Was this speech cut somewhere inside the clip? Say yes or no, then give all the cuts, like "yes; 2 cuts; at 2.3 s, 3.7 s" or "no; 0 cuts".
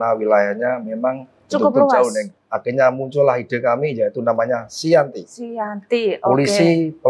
yes; 1 cut; at 2.4 s